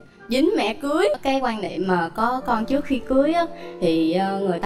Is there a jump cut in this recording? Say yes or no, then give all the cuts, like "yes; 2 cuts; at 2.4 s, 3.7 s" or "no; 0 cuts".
yes; 1 cut; at 1.2 s